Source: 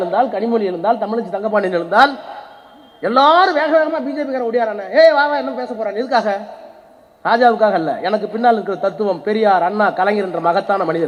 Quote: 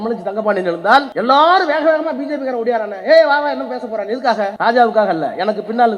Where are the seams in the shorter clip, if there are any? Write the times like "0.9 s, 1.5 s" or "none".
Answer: 1.1 s, 4.5 s